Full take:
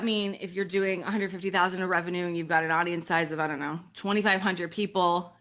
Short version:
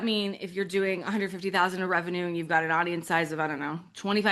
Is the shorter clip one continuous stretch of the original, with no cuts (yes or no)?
yes